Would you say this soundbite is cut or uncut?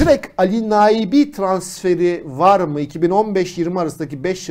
uncut